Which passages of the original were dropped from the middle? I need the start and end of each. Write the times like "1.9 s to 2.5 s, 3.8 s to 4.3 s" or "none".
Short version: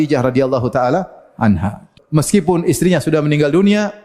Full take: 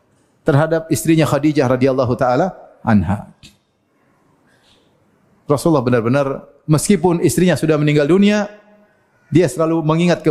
3.4 s to 6.5 s